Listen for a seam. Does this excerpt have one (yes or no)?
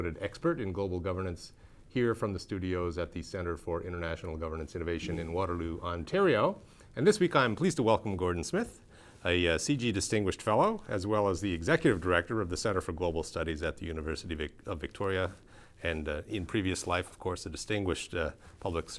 yes